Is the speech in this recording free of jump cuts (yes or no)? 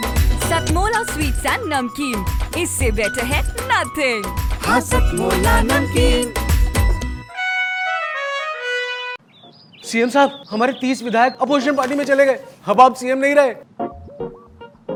yes